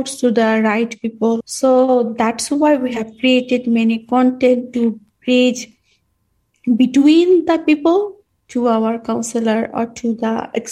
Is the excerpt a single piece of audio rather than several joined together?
no; 1 cut; at 1.4 s

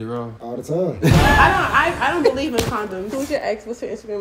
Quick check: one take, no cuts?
no; 1 cut; at 3.1 s

